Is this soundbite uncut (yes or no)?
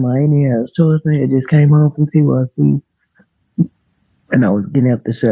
yes